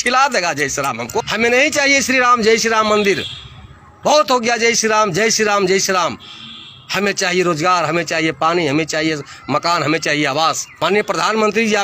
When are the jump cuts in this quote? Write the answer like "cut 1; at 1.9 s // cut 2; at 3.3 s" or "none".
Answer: cut 1; at 1.0 s // cut 2; at 10.6 s